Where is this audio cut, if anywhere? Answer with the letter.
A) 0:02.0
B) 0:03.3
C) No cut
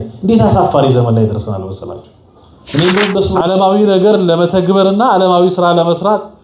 B